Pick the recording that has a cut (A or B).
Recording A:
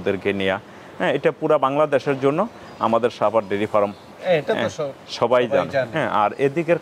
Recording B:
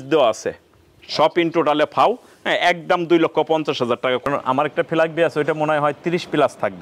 B